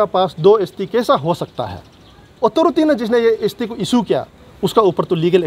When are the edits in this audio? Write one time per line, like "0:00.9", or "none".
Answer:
0:02.3
0:04.4